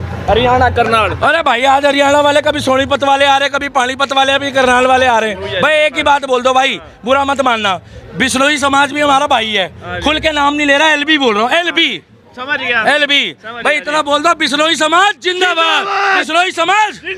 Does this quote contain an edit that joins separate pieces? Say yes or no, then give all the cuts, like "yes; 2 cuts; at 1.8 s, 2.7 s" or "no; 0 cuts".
no; 0 cuts